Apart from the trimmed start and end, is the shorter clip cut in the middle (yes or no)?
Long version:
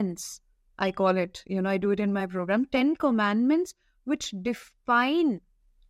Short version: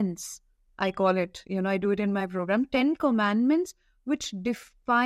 no